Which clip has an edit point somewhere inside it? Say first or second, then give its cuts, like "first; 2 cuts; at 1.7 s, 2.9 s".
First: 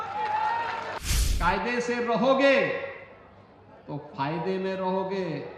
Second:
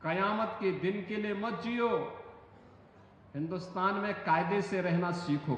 first; 1 cut; at 1.0 s